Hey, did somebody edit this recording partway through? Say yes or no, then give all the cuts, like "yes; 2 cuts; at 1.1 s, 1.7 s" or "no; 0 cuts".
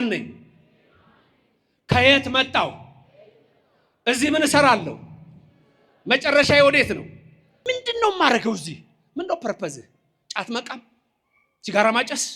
yes; 1 cut; at 7.5 s